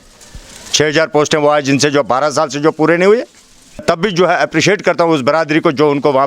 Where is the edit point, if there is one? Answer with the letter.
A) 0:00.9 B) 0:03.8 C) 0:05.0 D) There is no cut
B